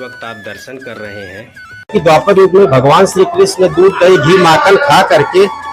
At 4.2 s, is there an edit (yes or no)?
no